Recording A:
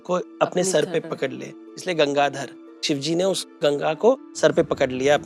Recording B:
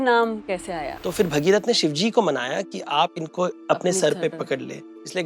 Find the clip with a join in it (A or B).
B